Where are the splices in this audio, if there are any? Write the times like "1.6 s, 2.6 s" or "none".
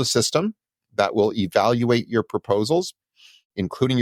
none